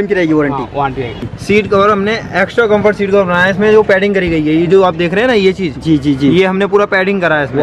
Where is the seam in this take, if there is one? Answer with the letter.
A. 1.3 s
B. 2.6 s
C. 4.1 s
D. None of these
A